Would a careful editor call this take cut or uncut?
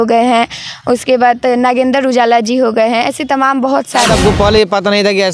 cut